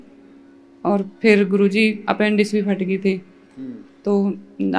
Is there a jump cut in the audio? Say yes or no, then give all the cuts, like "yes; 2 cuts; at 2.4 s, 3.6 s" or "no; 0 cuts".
no; 0 cuts